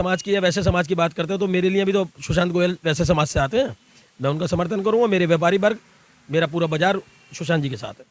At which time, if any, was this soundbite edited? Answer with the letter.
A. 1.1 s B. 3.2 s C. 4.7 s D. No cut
D